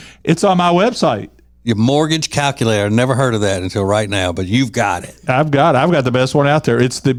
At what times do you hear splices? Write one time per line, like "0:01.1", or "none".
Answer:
none

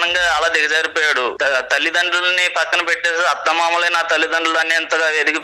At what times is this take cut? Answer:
0:01.4

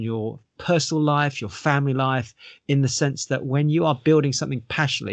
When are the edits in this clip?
none

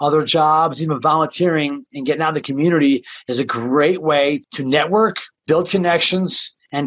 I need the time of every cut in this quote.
0:04.4
0:05.3

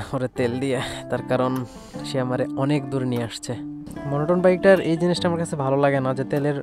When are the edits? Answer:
0:03.8

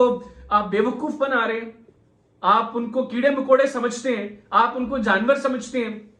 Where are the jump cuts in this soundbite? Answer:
none

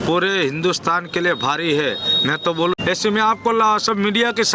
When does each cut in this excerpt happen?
0:02.8

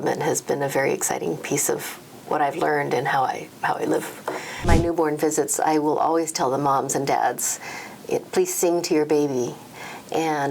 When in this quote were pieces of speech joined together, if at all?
0:04.6

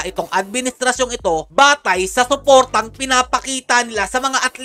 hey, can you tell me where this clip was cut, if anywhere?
none

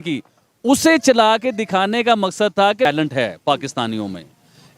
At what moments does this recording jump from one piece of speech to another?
0:02.9

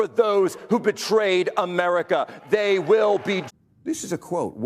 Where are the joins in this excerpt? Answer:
0:03.4

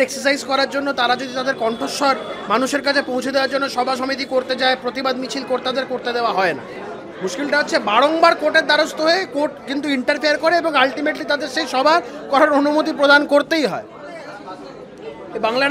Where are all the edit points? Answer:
none

